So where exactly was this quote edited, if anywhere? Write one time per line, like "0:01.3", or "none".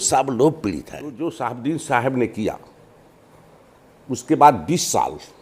0:01.1